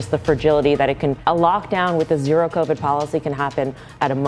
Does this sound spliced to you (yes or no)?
yes